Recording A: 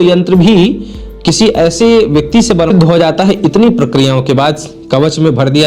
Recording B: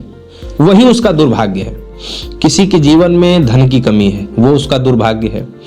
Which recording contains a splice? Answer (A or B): A